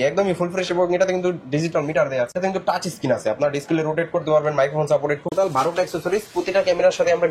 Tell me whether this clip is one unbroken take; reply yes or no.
no